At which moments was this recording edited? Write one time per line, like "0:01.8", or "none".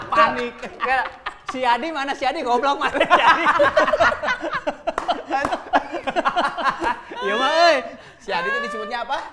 none